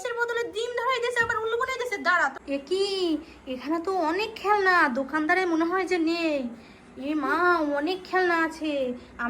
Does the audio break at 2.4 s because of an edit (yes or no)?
yes